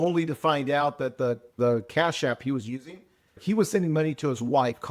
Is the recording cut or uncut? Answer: cut